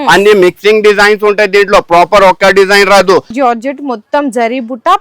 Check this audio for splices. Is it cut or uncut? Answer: cut